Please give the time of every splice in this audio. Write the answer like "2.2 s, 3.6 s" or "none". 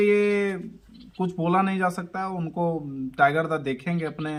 none